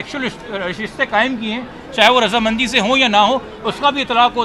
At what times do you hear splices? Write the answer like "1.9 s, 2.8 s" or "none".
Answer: none